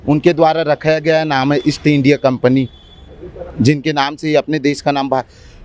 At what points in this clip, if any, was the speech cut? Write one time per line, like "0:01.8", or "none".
none